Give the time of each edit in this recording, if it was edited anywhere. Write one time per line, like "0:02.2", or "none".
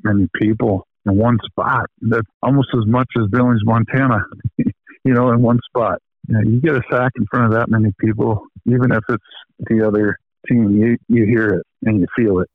0:00.9
0:02.3
0:06.1
0:08.9
0:10.3
0:11.3